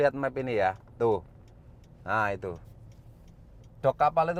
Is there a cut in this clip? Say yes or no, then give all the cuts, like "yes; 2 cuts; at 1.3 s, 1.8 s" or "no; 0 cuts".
no; 0 cuts